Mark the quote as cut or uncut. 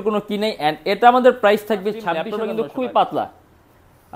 cut